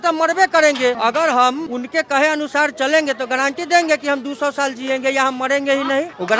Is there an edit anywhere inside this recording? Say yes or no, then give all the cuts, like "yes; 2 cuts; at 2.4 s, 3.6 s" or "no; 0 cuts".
yes; 2 cuts; at 1.0 s, 1.7 s